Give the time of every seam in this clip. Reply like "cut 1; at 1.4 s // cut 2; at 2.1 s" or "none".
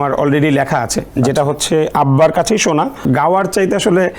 cut 1; at 3.0 s